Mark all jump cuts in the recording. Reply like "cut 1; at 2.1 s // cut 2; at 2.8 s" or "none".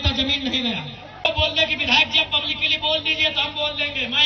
cut 1; at 1.2 s